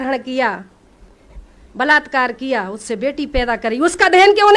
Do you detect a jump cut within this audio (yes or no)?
no